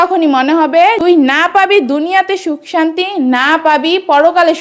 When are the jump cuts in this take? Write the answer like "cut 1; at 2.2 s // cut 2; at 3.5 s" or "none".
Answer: cut 1; at 1.0 s